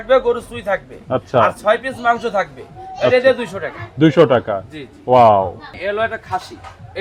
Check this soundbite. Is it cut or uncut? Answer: uncut